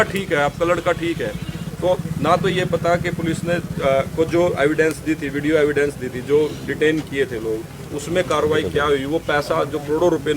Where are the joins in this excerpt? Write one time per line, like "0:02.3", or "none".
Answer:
none